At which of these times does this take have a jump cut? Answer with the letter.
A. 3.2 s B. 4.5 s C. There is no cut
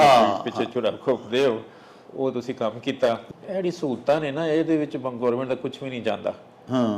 A